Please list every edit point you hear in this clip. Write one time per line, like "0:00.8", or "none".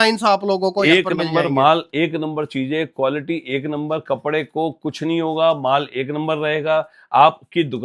none